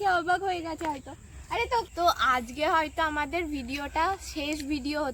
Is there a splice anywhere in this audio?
yes; 1 cut; at 1.9 s

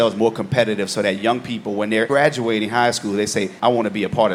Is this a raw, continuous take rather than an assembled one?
yes; 0 cuts

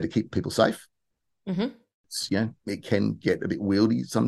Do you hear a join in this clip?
no; 0 cuts

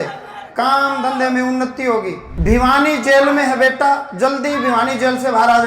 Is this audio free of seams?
no; 1 cut; at 2.2 s

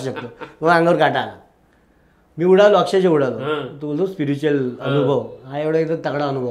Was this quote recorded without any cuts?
yes; 0 cuts

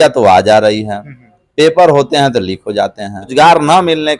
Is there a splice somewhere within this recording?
yes; 1 cut; at 3.3 s

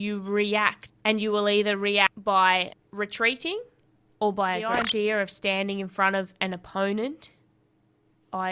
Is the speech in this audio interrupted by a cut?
yes; 1 cut; at 4.7 s

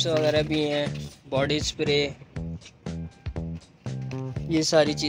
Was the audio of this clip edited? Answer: no; 0 cuts

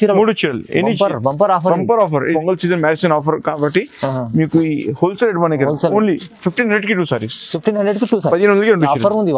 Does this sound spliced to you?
yes; 1 cut; at 2.3 s

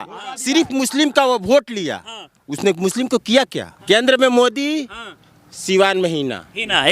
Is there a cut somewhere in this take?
yes; 1 cut; at 3.7 s

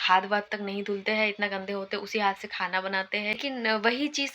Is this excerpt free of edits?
no; 1 cut; at 3.3 s

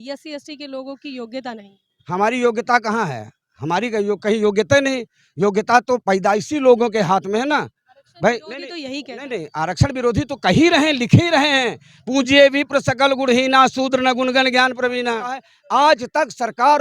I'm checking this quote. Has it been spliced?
yes; 1 cut; at 15.5 s

